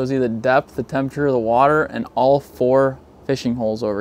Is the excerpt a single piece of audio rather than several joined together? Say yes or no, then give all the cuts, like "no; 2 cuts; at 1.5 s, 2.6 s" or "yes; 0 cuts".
no; 1 cut; at 3.1 s